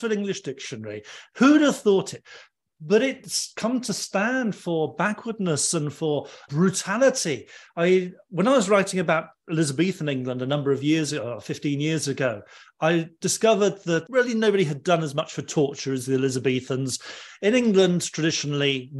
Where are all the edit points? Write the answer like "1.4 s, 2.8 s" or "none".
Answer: 3.2 s